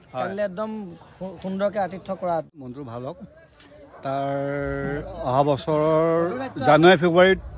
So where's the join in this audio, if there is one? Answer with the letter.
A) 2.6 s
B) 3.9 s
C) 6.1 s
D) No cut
A